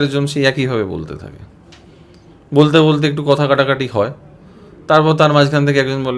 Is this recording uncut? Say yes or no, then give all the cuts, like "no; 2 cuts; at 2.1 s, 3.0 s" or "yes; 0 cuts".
yes; 0 cuts